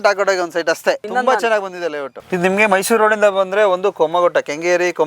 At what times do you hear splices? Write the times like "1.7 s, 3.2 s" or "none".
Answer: 2.1 s